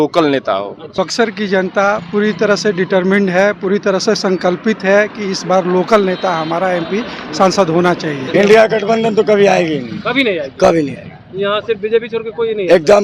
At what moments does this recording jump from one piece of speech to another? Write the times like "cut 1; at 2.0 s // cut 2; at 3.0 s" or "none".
cut 1; at 0.9 s // cut 2; at 8.2 s

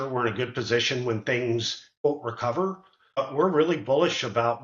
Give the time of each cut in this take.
cut 1; at 2.0 s // cut 2; at 3.2 s

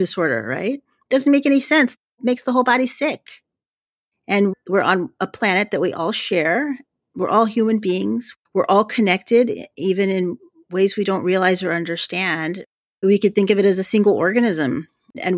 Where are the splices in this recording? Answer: cut 1; at 2.1 s // cut 2; at 3.6 s

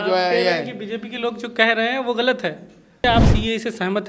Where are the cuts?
cut 1; at 3.0 s

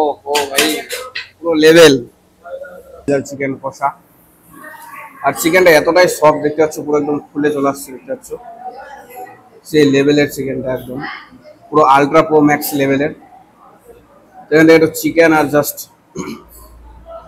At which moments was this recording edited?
cut 1; at 3.1 s

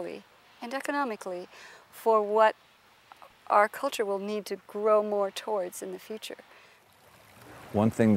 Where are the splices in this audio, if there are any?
cut 1; at 7.0 s

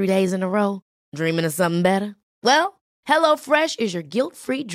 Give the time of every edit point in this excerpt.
none

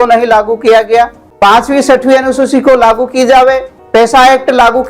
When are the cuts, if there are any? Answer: cut 1; at 1.2 s // cut 2; at 3.7 s

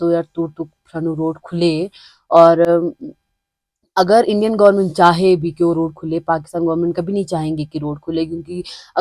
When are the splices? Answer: none

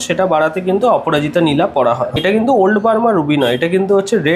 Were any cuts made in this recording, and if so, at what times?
cut 1; at 2.2 s

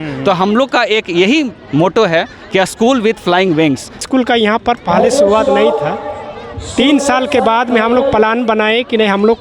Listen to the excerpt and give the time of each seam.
cut 1; at 4.0 s

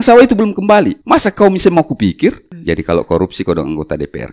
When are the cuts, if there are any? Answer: cut 1; at 1.0 s // cut 2; at 2.5 s

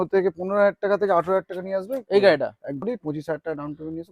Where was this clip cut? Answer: cut 1; at 2.8 s

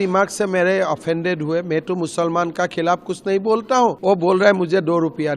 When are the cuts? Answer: cut 1; at 4.0 s

